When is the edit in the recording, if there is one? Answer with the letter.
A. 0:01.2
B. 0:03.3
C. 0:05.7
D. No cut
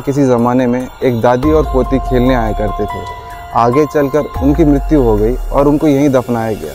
D